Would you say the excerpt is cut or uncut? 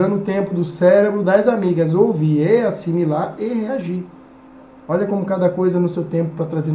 uncut